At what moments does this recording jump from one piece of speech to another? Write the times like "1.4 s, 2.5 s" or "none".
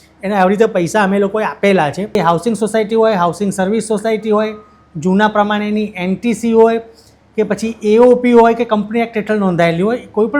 2.2 s